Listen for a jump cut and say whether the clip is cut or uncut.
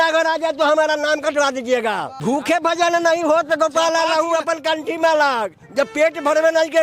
cut